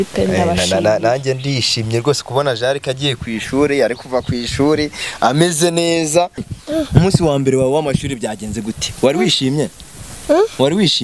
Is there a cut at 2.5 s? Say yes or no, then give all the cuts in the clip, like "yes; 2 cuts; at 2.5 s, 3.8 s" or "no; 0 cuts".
no; 1 cut; at 6.5 s